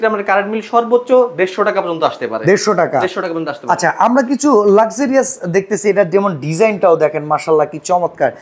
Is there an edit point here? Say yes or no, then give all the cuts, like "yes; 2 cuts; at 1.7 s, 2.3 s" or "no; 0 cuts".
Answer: no; 0 cuts